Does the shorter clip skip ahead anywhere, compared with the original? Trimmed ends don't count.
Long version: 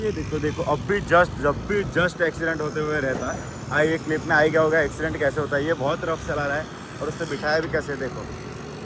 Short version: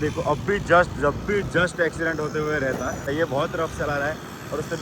yes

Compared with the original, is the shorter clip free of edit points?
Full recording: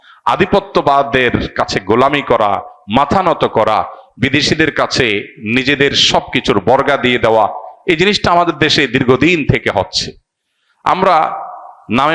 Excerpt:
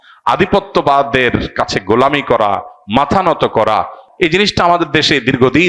no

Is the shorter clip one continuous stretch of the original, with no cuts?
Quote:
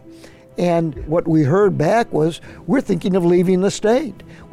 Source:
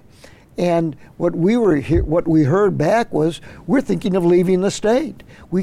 no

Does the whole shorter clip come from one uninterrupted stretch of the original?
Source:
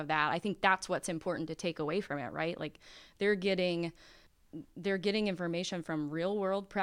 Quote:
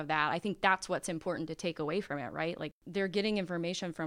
no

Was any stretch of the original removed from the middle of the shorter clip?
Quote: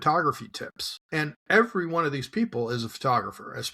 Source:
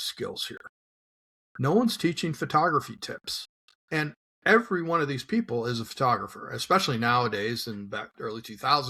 yes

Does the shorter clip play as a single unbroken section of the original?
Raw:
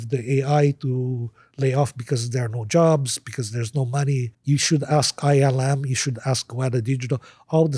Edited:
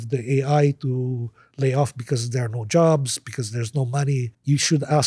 yes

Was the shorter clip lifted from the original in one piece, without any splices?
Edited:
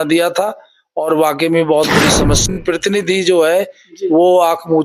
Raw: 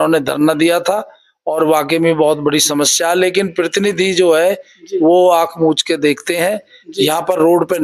no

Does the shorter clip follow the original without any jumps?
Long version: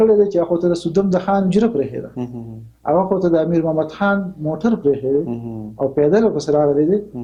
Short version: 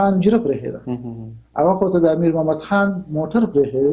yes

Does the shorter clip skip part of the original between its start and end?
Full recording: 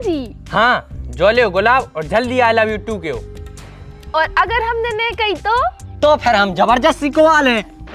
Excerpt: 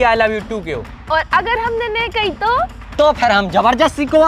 yes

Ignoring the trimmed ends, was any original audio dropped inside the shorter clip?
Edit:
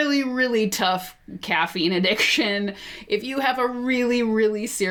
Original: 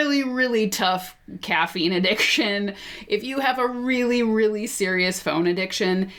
no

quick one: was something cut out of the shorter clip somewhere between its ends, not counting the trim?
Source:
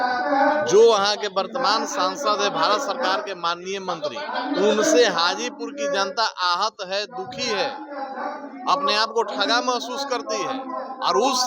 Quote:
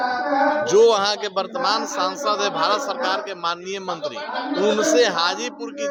no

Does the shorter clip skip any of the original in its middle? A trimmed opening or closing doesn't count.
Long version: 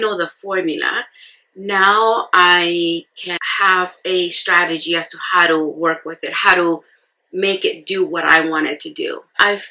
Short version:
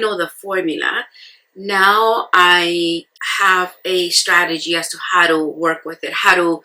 yes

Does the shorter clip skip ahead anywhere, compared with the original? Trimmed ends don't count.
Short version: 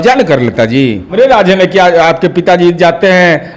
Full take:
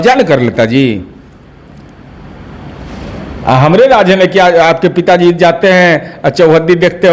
yes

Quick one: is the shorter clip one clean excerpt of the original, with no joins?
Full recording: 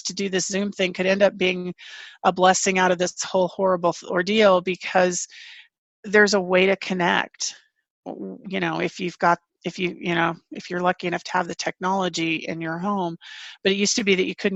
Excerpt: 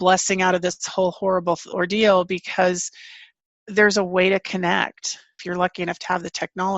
no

